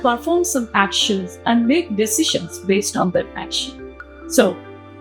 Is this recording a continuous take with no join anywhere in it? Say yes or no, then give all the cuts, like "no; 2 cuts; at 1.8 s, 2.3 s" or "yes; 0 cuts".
yes; 0 cuts